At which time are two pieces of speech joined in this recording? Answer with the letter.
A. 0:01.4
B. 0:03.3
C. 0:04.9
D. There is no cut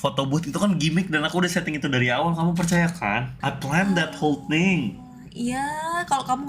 B